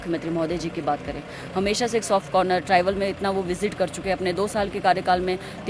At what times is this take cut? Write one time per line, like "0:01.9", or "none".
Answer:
none